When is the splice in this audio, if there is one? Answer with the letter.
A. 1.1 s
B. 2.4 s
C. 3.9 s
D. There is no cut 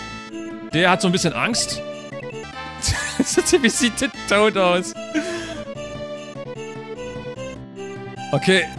B